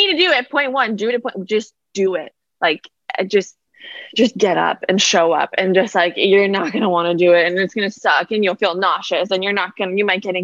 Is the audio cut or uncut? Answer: uncut